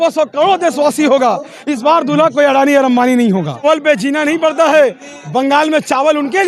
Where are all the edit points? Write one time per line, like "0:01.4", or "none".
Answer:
0:03.6